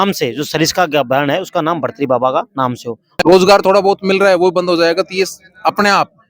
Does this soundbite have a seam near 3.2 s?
yes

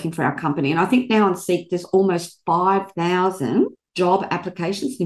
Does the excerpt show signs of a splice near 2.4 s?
no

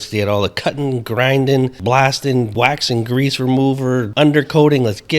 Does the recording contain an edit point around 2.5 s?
yes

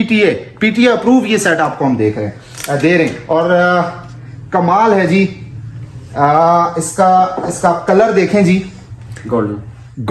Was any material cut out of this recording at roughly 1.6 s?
no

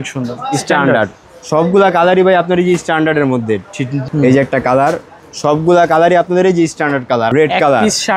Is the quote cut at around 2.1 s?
no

